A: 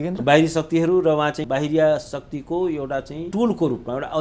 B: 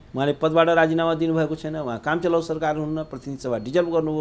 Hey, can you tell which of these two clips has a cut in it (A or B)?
A